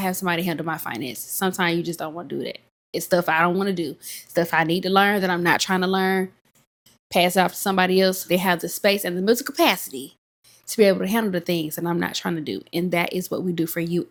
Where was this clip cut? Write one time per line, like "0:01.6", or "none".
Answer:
none